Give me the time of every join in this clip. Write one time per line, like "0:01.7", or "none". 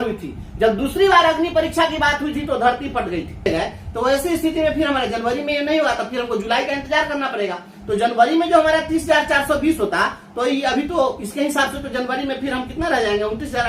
0:03.5